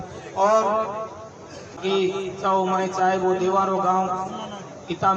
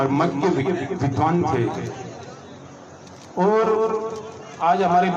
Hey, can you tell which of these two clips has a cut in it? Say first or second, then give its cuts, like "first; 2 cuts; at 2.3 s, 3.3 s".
first; 1 cut; at 1.8 s